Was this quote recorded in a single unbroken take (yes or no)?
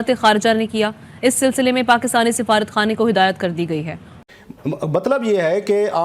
no